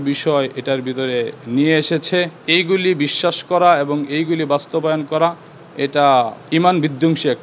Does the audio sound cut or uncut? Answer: cut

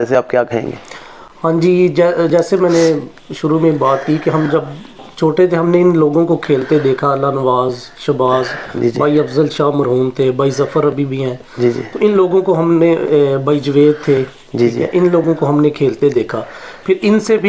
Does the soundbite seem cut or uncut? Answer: uncut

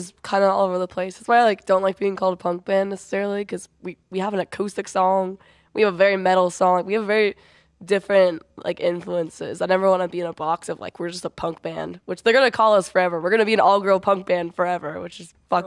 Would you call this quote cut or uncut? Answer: uncut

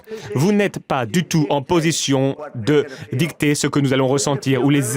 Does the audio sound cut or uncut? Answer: cut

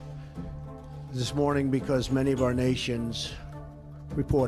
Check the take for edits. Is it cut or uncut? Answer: uncut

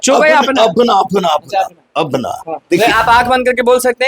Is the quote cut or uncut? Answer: cut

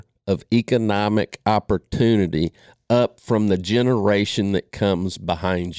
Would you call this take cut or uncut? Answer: uncut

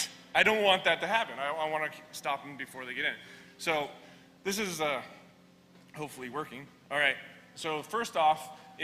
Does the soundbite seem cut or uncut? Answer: cut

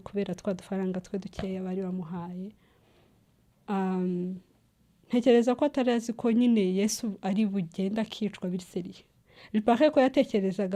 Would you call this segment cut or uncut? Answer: uncut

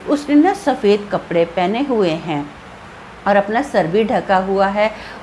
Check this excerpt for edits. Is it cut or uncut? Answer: uncut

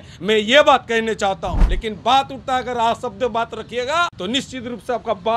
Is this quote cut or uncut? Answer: cut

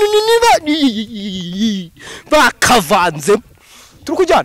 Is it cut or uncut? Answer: uncut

